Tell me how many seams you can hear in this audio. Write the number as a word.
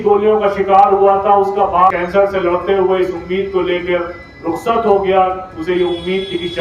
one